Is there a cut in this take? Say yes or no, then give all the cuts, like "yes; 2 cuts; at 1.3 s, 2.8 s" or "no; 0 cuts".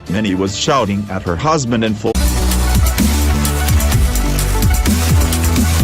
yes; 1 cut; at 2.1 s